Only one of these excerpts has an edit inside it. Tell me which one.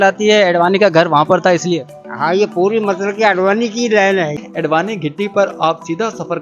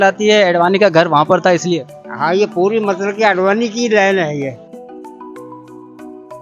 first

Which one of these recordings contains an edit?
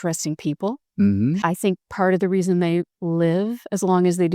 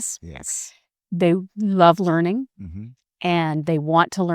first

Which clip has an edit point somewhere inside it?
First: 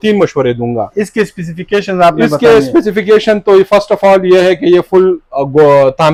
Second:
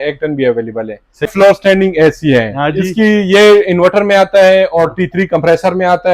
second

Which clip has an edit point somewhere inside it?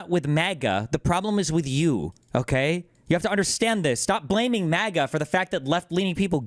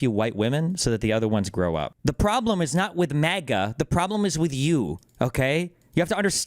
second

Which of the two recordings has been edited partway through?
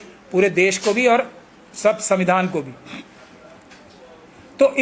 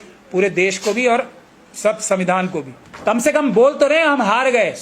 second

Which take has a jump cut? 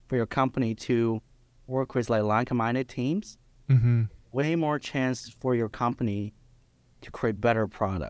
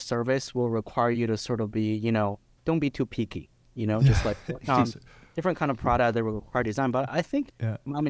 second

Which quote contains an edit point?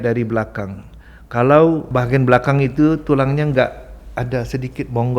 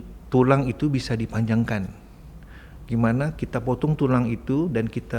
first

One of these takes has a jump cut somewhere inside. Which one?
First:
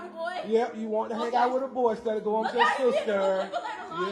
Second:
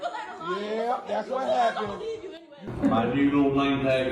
second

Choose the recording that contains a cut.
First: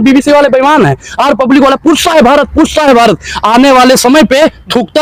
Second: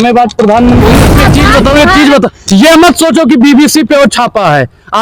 second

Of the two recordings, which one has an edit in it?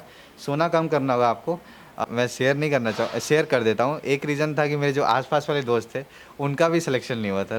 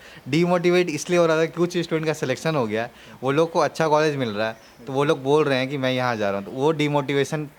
first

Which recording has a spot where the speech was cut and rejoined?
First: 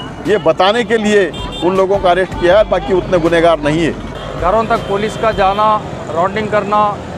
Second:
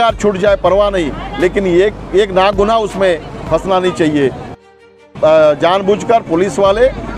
first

